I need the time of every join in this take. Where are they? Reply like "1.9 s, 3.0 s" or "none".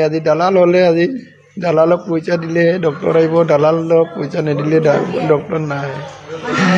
none